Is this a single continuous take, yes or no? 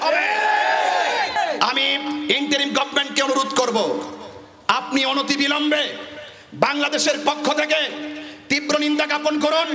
no